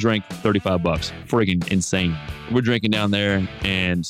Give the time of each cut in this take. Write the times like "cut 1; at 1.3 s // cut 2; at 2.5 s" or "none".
cut 1; at 2.3 s